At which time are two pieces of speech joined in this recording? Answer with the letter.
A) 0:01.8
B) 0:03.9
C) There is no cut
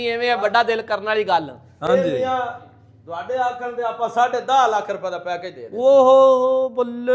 C